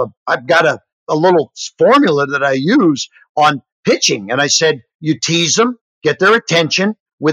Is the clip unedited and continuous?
yes; 0 cuts

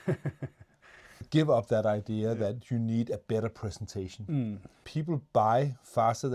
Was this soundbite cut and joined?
yes; 2 cuts; at 1.3 s, 4.7 s

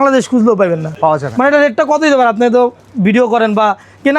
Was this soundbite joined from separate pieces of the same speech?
no; 0 cuts

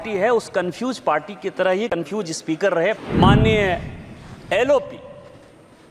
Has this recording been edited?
yes; 1 cut; at 3.0 s

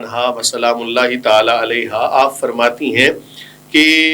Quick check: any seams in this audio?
no; 0 cuts

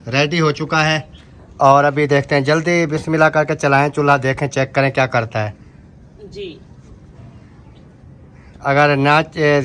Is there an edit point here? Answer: no; 0 cuts

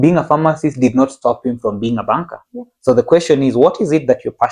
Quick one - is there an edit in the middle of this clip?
no; 0 cuts

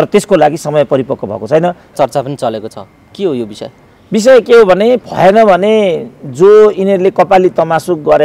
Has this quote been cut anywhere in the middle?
yes; 2 cuts; at 1.9 s, 5.0 s

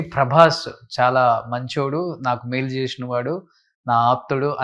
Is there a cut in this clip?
no; 0 cuts

